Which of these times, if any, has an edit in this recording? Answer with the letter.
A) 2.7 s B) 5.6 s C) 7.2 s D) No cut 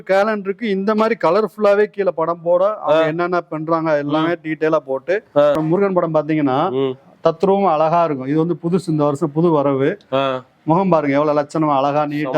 B